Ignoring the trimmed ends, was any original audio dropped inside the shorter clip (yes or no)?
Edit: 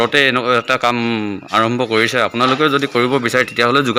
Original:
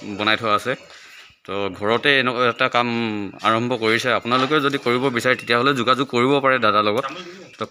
no